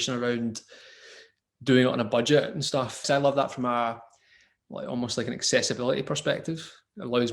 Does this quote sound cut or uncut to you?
cut